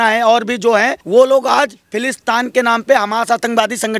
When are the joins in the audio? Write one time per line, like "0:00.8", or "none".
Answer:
0:01.0